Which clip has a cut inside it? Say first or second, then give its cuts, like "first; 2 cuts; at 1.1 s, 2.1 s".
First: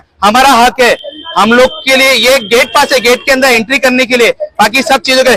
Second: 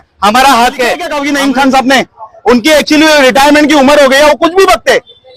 second; 1 cut; at 1.1 s